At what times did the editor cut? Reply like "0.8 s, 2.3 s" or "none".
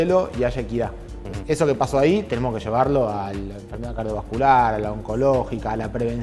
none